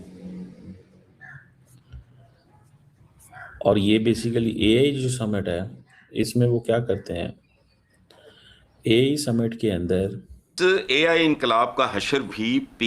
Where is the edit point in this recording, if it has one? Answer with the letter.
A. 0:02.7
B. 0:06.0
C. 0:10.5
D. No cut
C